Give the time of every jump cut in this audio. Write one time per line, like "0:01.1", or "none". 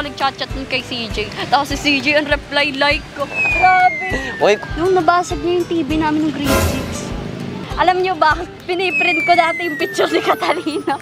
0:04.6
0:07.6